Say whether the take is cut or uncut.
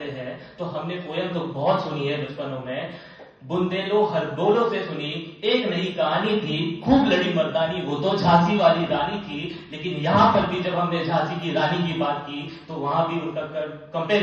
uncut